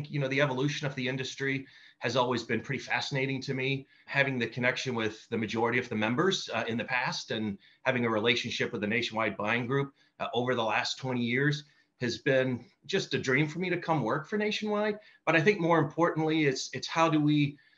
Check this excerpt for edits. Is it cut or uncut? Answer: cut